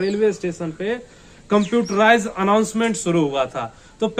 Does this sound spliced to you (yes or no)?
no